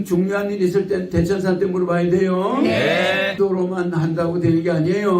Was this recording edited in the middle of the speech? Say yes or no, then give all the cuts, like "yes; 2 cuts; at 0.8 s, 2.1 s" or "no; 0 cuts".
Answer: yes; 1 cut; at 3.6 s